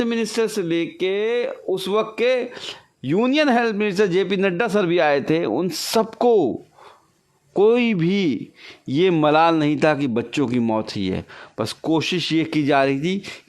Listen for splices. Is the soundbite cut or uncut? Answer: uncut